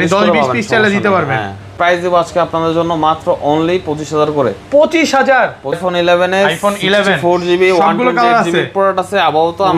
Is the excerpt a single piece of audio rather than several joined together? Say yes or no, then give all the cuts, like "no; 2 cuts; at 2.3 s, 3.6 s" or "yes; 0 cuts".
no; 2 cuts; at 1.8 s, 5.8 s